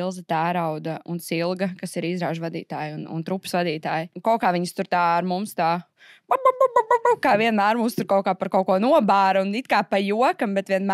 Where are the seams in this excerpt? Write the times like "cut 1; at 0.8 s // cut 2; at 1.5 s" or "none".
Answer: cut 1; at 1.0 s // cut 2; at 4.1 s